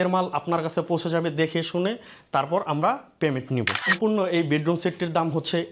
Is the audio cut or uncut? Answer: cut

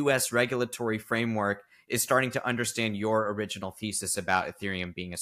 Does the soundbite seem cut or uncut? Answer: uncut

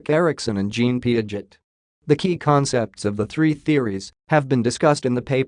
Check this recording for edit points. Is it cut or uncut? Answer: uncut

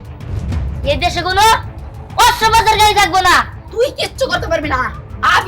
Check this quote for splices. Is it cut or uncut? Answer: cut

